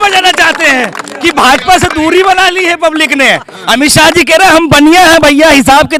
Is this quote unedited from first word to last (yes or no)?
yes